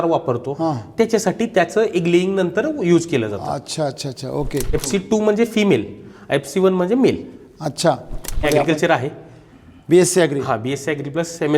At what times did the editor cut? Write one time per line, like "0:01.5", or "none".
0:04.7
0:08.4